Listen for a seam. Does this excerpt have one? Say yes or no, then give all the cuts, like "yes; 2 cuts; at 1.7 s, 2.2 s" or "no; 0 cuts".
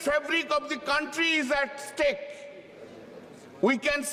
no; 0 cuts